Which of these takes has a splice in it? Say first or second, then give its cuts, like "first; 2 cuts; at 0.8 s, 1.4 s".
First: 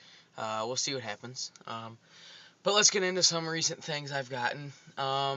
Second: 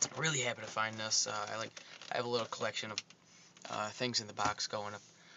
second; 1 cut; at 3.6 s